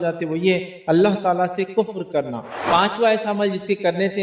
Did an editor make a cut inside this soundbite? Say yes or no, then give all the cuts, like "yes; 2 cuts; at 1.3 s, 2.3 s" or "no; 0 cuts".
yes; 1 cut; at 2.5 s